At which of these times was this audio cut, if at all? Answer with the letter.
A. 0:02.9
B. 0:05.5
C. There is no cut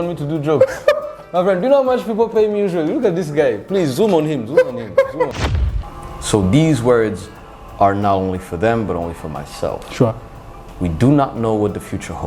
B